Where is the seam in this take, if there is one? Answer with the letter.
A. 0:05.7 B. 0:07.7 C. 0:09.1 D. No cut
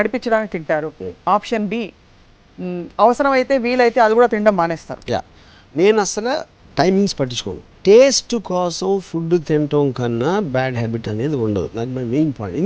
B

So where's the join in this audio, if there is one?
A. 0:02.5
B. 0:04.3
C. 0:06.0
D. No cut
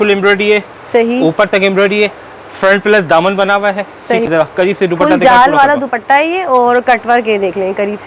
B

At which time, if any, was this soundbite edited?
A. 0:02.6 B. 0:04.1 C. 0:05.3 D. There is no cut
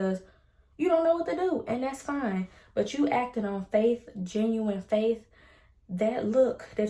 D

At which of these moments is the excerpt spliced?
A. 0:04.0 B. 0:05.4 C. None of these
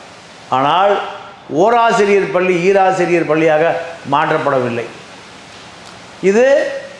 C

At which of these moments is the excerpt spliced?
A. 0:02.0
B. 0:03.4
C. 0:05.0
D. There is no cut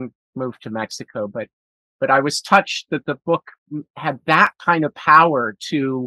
D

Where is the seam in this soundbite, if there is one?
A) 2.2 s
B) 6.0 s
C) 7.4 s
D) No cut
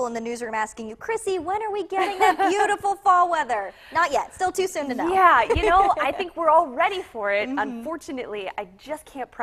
D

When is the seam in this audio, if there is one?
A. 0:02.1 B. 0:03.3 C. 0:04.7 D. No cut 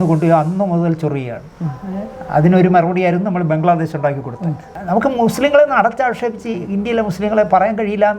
C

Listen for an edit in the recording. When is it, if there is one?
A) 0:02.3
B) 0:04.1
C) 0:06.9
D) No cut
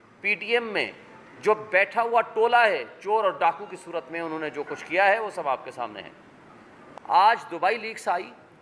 C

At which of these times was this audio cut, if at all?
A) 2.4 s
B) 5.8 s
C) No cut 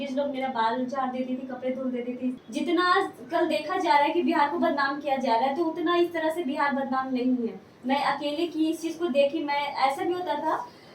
A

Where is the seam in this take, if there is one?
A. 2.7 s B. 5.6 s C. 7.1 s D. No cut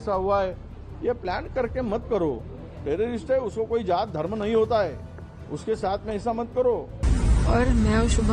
C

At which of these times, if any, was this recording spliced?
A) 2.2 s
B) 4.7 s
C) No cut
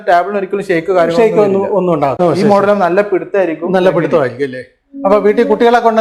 A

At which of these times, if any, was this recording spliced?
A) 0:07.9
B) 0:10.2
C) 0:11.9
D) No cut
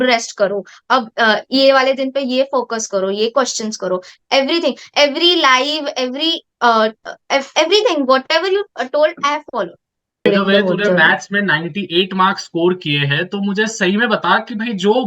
B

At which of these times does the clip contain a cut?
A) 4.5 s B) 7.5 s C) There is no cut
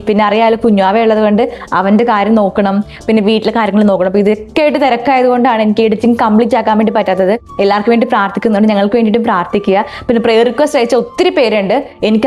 B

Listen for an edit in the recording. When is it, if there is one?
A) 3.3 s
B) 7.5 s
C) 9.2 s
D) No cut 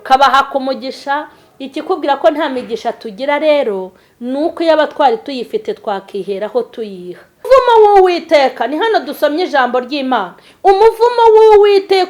B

